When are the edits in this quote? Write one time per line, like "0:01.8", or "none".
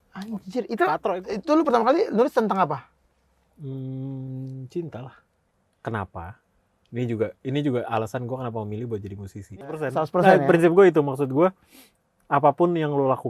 0:01.0
0:05.4
0:09.8